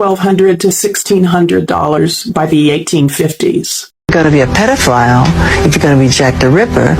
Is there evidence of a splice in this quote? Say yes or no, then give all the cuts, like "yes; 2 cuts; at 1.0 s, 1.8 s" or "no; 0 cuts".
yes; 1 cut; at 4.0 s